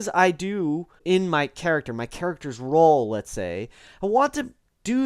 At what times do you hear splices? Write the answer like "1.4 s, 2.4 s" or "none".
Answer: 1.0 s